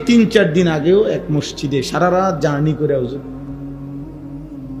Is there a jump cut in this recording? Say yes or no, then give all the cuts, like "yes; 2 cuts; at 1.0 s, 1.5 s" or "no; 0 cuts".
yes; 1 cut; at 3.5 s